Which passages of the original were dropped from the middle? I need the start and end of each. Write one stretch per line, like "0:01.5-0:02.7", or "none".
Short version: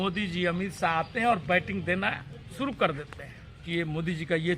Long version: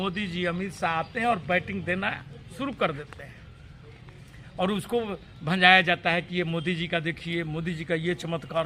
0:03.6-0:07.2